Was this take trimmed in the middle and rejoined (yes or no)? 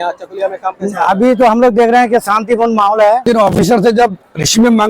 yes